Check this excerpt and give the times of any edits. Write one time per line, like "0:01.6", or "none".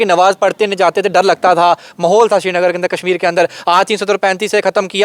none

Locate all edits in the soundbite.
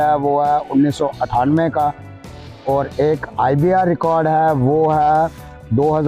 none

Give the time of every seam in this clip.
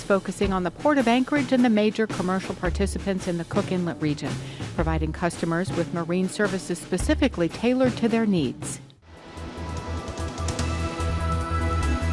0:08.9

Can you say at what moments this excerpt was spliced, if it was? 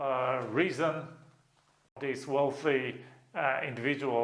0:01.9

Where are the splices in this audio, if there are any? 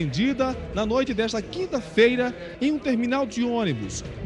none

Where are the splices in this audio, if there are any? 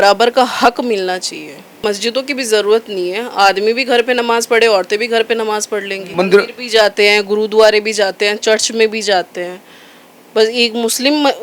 0:01.8
0:06.0

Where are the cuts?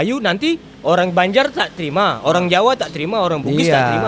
none

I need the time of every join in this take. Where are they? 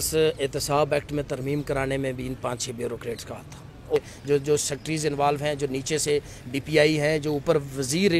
0:04.0

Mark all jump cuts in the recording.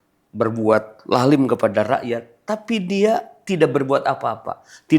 0:01.9

